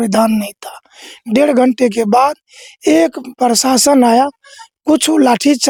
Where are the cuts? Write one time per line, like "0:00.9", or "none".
none